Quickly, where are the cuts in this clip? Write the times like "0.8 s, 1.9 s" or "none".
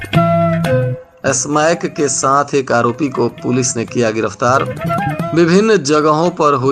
1.0 s